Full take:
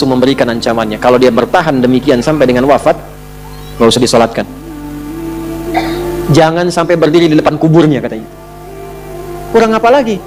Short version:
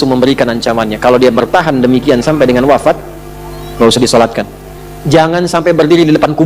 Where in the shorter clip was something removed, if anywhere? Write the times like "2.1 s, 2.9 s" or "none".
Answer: 5.0 s

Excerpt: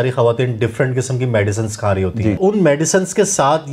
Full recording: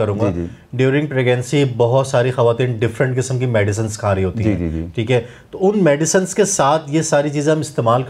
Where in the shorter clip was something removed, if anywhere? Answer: 2.4 s

